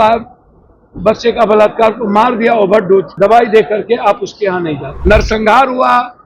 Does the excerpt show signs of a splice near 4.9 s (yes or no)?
yes